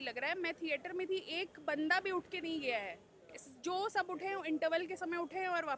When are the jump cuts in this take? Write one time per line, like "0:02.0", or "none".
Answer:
none